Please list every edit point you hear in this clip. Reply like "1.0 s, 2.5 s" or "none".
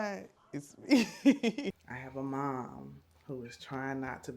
1.7 s